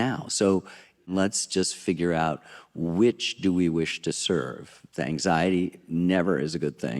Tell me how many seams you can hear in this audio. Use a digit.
1